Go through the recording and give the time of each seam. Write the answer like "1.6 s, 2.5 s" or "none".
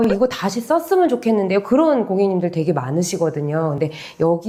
none